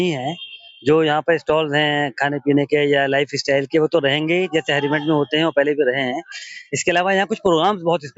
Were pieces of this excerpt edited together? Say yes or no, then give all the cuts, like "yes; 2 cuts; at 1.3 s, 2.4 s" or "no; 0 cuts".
no; 0 cuts